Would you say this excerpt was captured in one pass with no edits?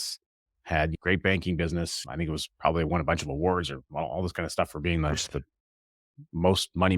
no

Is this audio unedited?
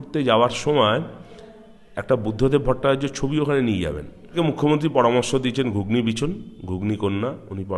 no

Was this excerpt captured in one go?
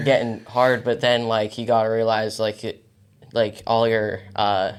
yes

